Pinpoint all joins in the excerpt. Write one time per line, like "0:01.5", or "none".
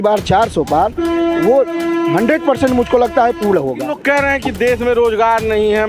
0:03.9